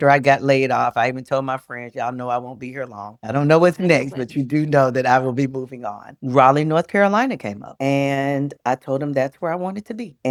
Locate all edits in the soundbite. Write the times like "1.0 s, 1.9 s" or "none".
none